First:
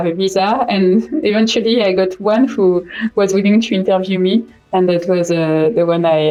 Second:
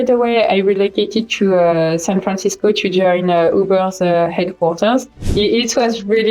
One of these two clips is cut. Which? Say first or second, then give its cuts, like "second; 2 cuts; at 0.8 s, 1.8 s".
second; 1 cut; at 5.3 s